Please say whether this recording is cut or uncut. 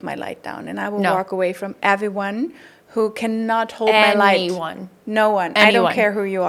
uncut